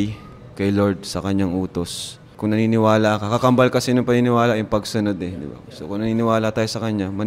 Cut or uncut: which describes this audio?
cut